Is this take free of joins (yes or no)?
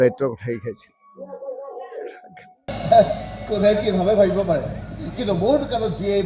no